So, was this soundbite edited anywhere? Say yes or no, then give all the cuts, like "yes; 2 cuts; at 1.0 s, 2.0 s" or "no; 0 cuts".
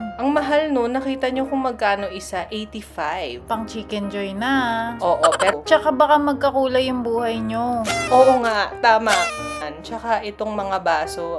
yes; 2 cuts; at 5.5 s, 9.7 s